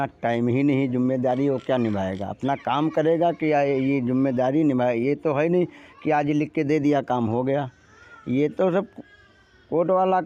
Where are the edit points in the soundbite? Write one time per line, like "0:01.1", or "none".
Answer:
none